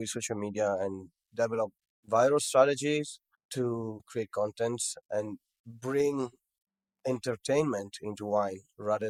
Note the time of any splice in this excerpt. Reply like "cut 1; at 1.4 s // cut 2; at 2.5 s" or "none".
none